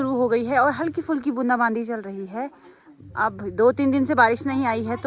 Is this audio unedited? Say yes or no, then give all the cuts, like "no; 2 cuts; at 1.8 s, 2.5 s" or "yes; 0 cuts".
yes; 0 cuts